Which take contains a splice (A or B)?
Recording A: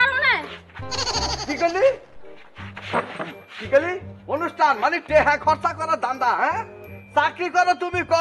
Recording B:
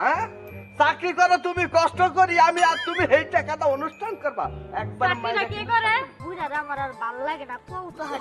B